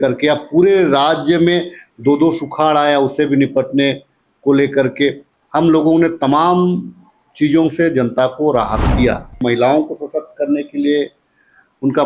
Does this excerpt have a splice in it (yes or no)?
yes